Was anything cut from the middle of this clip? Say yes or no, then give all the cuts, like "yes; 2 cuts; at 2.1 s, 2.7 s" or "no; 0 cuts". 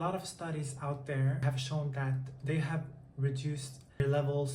yes; 1 cut; at 1.4 s